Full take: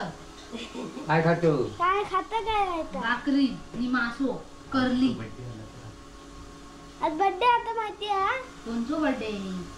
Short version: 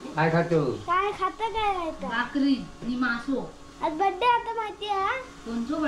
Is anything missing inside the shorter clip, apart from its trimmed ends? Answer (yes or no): yes